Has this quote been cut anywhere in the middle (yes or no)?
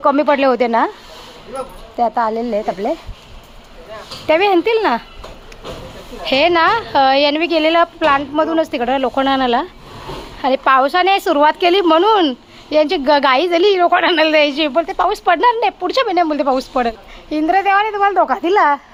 no